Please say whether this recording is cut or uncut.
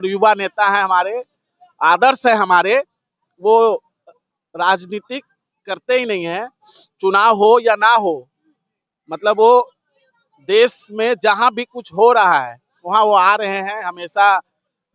uncut